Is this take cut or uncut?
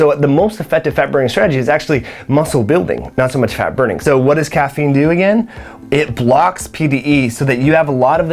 cut